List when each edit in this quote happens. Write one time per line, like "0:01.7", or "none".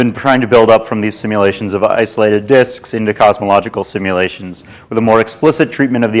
0:04.7